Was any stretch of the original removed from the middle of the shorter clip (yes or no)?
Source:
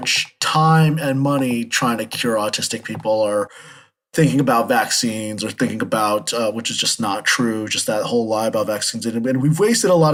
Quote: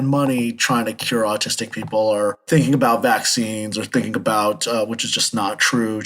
yes